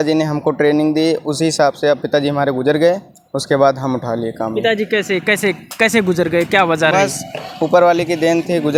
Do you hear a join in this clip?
no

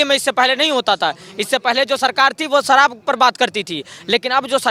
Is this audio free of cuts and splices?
yes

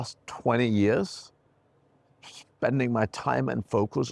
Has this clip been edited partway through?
no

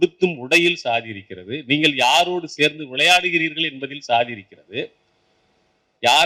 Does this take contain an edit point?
no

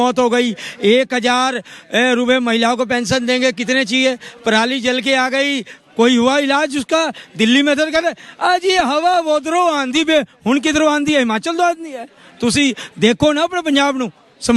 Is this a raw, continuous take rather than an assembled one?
yes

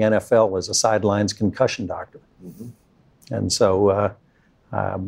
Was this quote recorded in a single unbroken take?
yes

